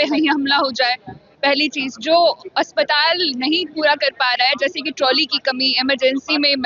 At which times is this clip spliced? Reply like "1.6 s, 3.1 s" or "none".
none